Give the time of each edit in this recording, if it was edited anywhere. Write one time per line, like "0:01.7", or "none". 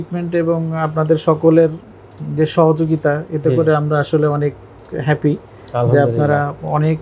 none